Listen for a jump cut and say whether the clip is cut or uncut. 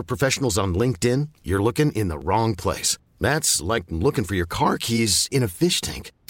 uncut